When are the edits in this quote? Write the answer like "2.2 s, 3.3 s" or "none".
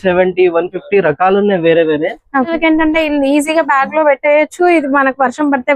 2.5 s